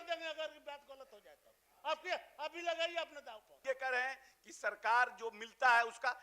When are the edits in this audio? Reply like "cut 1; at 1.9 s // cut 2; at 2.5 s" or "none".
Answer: cut 1; at 3.6 s